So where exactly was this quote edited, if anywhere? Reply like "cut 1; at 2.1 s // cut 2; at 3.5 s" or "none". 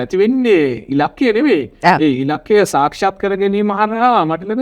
none